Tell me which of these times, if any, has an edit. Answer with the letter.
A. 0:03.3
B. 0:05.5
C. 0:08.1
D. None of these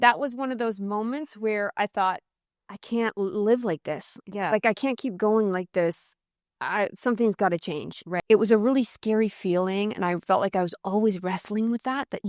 C